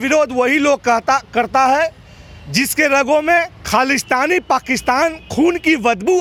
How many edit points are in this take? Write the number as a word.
zero